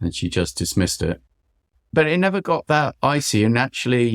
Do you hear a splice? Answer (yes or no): yes